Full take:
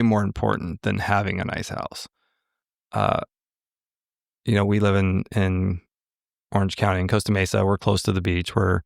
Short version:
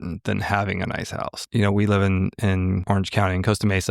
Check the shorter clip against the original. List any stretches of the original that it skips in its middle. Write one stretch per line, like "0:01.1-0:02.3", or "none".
0:02.0-0:04.3
0:05.7-0:06.5